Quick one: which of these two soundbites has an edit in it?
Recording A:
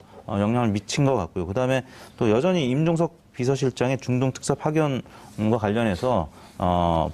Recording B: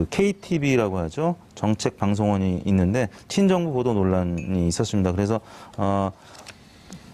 A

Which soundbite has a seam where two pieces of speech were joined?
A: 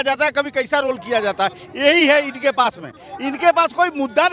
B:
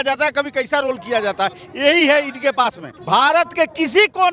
B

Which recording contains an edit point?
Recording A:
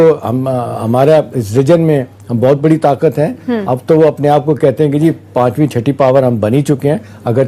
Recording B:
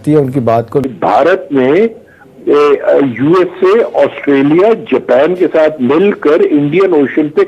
B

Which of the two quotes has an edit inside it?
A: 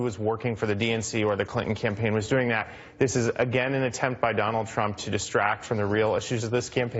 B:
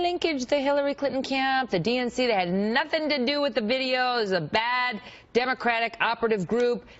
B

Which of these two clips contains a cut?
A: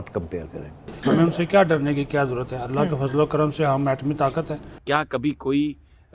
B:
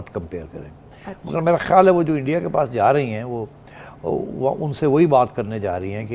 A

